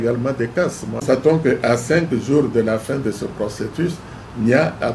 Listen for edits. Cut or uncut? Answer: cut